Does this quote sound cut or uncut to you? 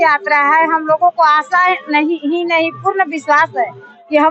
uncut